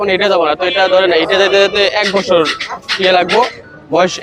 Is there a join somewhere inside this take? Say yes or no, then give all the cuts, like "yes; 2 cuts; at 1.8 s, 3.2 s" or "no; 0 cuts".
no; 0 cuts